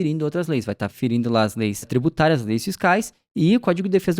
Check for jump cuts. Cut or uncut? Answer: cut